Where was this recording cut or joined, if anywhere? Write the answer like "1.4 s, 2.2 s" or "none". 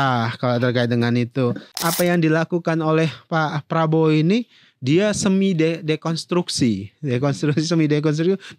1.7 s